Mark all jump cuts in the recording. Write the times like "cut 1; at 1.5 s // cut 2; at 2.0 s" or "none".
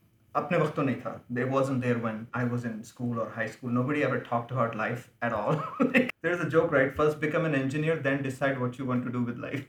cut 1; at 6.1 s